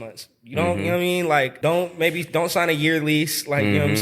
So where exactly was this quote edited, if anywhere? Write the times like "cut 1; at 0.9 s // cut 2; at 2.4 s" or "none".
cut 1; at 1.5 s

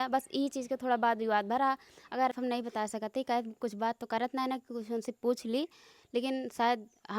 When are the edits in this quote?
cut 1; at 2.3 s

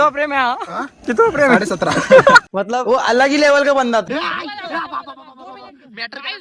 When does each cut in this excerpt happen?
cut 1; at 4.2 s

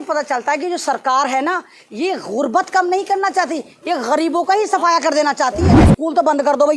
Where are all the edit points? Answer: cut 1; at 5.7 s

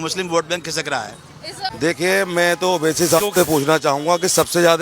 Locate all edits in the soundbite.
cut 1; at 1.6 s

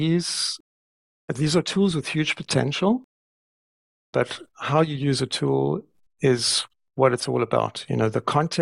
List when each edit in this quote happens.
cut 1; at 0.9 s

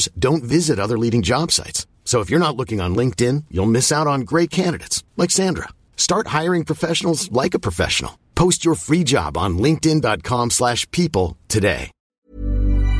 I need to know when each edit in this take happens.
cut 1; at 11.9 s

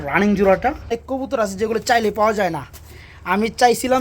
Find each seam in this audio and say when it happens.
cut 1; at 0.9 s

